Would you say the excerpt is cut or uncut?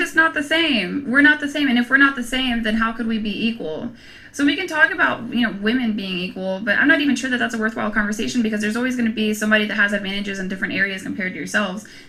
uncut